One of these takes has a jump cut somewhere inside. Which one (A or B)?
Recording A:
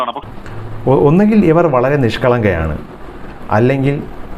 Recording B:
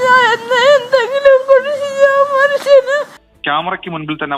B